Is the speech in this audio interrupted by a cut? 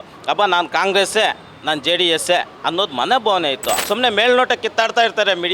yes; 1 cut; at 3.8 s

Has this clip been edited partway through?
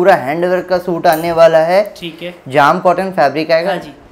no; 0 cuts

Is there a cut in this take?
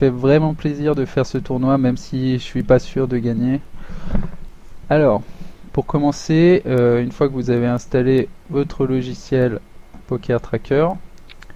no; 0 cuts

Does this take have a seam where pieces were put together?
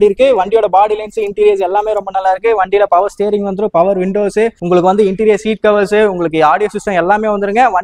no; 0 cuts

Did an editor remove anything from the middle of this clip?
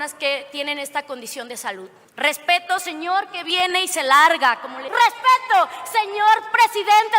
yes; 2 cuts; at 2.0 s, 4.8 s

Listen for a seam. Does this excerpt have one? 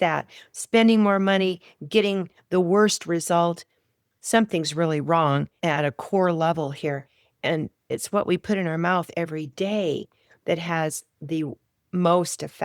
yes; 2 cuts; at 5.6 s, 7.9 s

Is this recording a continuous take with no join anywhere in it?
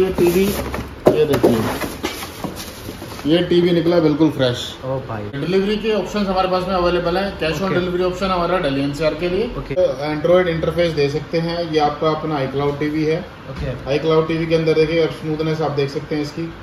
no; 2 cuts; at 5.4 s, 9.8 s

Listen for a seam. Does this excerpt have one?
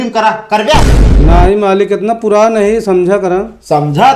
no; 0 cuts

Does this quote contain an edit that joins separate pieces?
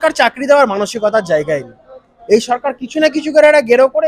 no; 0 cuts

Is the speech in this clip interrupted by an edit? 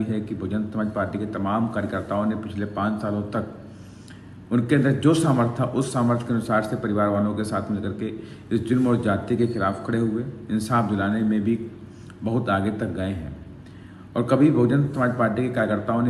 no; 0 cuts

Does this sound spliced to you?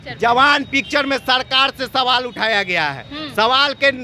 no; 0 cuts

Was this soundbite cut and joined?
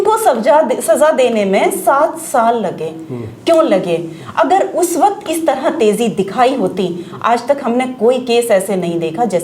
no; 0 cuts

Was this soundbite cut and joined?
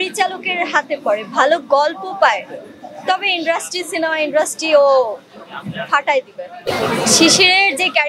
yes; 1 cut; at 6.7 s

